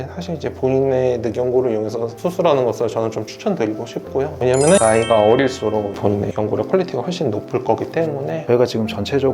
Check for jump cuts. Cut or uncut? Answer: cut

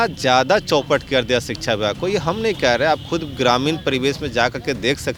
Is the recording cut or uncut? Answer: uncut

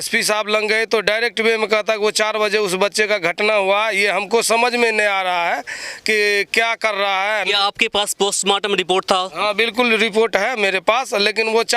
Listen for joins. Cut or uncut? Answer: uncut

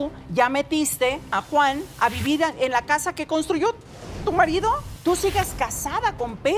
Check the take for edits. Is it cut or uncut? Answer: cut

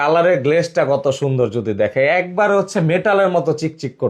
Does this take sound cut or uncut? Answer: uncut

